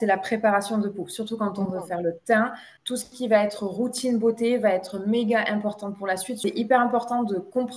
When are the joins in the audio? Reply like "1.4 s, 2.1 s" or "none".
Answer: 2.7 s, 6.4 s